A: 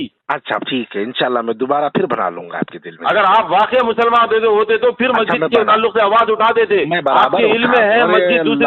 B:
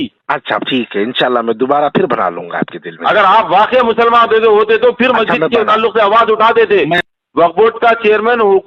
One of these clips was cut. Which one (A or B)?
B